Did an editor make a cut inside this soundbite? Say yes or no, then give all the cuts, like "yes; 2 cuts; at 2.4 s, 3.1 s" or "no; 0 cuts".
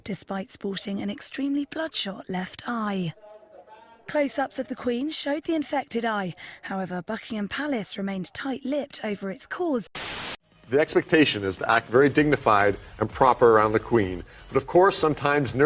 no; 0 cuts